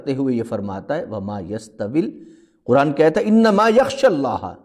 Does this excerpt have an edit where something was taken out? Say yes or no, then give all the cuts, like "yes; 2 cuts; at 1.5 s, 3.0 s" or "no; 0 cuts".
no; 0 cuts